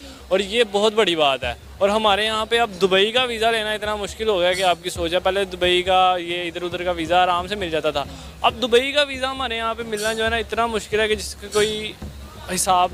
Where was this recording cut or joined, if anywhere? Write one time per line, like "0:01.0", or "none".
none